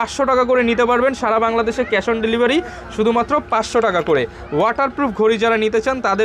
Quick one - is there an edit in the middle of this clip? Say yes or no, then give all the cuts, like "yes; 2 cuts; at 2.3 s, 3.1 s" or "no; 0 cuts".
no; 0 cuts